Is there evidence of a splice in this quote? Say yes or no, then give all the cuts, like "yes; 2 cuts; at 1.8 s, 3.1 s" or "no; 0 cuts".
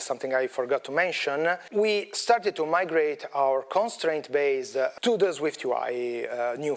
yes; 2 cuts; at 1.6 s, 4.9 s